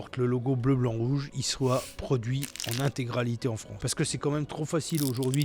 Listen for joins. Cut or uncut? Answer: cut